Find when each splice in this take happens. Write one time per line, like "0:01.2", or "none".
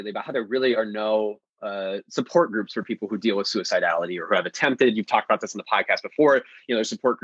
none